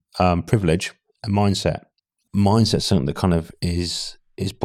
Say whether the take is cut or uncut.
cut